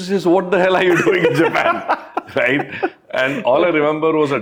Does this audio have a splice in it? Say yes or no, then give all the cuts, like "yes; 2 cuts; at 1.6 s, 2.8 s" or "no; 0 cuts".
no; 0 cuts